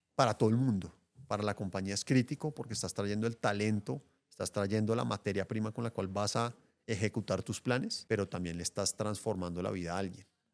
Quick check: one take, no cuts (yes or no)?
no